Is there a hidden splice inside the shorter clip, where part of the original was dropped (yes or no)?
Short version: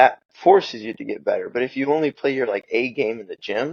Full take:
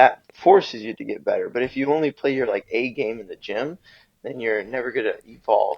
no